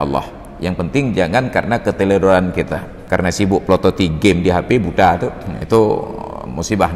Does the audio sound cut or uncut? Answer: cut